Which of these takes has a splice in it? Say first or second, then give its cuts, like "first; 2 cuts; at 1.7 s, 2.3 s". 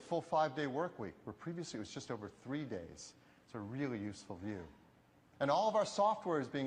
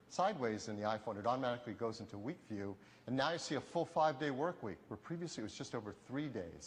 first; 1 cut; at 5.7 s